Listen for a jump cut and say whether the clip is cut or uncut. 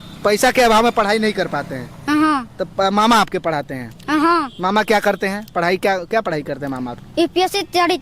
uncut